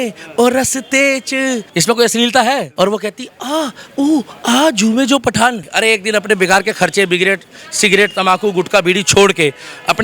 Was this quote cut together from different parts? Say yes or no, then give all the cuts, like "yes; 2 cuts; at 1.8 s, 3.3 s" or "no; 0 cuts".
yes; 2 cuts; at 2.7 s, 5.7 s